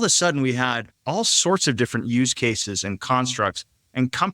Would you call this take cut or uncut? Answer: cut